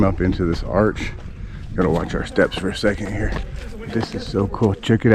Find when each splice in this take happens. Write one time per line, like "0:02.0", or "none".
none